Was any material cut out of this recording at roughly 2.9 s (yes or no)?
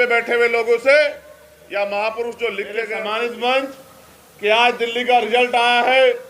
yes